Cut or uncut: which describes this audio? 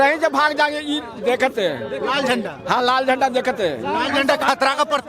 uncut